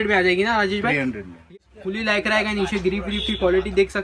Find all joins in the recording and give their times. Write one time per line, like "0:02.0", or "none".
0:01.4